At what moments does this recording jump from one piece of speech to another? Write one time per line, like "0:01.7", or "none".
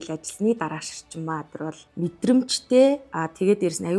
none